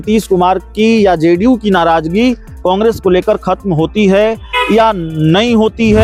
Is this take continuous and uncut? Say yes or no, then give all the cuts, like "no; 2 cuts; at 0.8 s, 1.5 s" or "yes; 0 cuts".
yes; 0 cuts